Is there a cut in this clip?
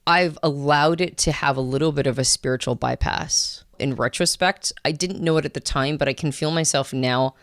yes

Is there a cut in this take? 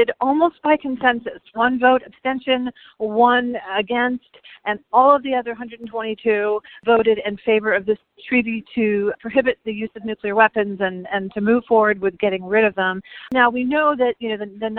no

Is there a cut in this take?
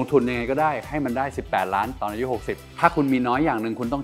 yes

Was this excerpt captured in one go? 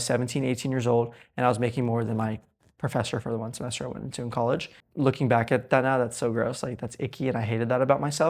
no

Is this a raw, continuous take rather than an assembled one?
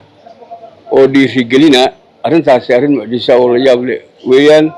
yes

